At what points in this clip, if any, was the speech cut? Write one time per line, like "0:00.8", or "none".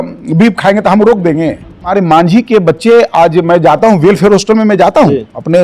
0:01.9